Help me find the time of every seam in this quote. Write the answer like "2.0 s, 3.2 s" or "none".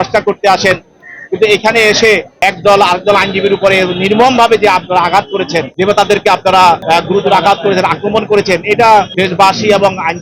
6.8 s, 9.1 s